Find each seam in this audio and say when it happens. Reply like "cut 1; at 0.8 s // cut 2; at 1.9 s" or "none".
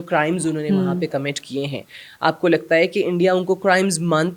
none